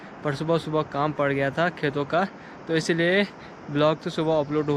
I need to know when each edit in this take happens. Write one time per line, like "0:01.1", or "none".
none